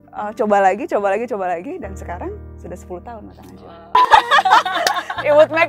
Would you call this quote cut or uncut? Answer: cut